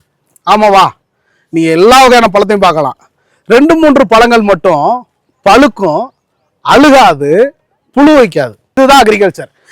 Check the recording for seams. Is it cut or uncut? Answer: cut